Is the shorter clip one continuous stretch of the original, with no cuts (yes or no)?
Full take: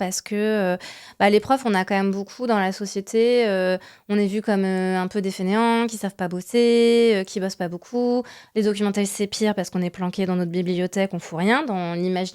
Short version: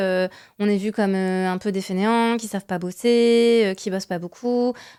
yes